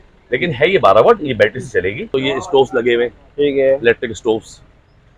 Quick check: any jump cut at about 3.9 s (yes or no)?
no